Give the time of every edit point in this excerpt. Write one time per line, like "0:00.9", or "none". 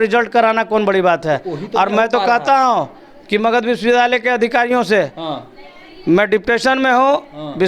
none